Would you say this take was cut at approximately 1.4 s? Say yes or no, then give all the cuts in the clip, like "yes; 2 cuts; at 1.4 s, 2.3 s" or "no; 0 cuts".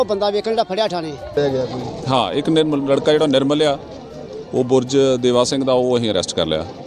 yes; 1 cut; at 1.4 s